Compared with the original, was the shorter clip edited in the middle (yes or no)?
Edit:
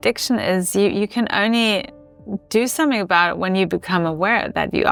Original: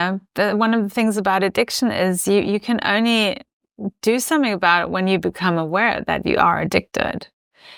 no